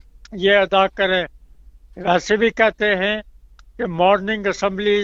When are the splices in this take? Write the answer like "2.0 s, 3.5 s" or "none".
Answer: none